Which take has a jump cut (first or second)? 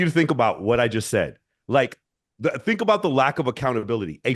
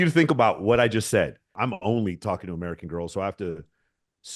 second